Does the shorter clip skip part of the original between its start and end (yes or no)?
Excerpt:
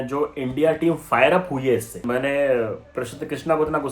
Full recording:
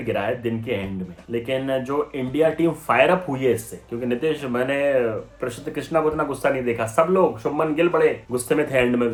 yes